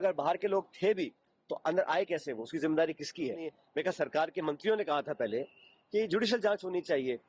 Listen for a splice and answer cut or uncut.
cut